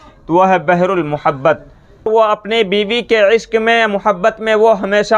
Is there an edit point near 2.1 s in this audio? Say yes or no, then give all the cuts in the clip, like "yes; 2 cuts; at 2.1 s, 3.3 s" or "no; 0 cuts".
yes; 1 cut; at 2.1 s